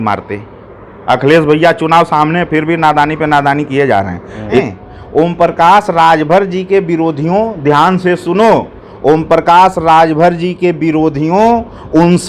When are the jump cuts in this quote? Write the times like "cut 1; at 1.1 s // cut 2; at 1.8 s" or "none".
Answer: cut 1; at 4.6 s